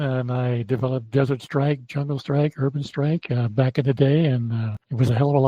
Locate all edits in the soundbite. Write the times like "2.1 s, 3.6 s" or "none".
none